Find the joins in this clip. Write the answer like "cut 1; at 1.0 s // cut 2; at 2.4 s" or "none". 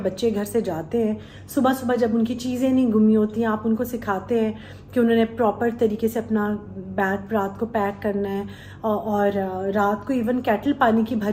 none